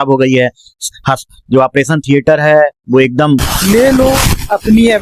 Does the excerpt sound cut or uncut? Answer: cut